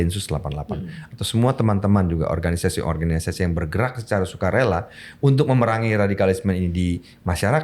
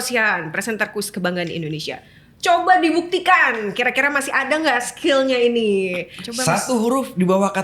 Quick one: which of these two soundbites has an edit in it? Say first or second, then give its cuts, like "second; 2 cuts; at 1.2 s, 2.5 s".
second; 1 cut; at 6.2 s